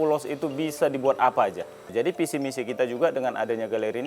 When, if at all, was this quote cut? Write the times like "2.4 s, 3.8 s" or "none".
1.8 s

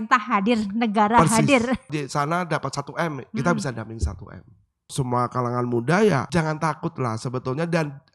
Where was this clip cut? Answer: 1.9 s, 4.9 s, 6.3 s

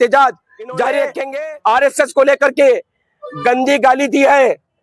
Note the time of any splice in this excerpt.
1.2 s

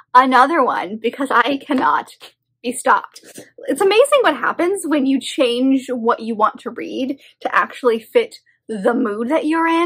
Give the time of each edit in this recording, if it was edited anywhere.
none

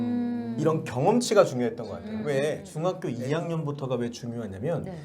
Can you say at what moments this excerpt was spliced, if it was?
2.7 s

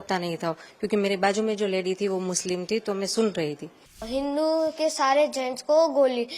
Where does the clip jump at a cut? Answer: 4.0 s

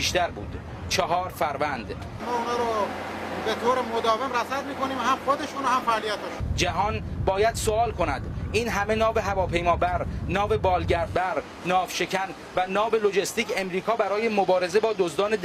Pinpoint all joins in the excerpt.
5.6 s

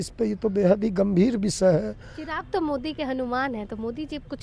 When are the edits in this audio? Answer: none

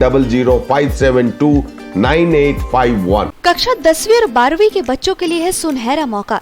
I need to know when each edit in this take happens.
3.3 s

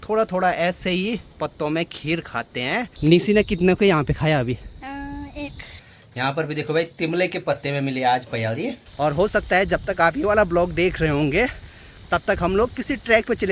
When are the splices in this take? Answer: 2.9 s, 5.8 s, 8.7 s

